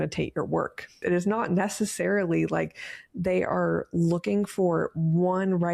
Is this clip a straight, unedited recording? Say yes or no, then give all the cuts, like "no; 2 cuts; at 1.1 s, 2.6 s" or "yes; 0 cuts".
no; 1 cut; at 1.0 s